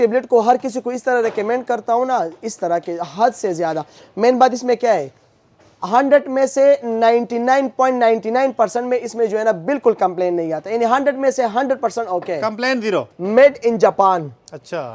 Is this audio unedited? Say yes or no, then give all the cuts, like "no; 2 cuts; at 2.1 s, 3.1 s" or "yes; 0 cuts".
no; 1 cut; at 13.1 s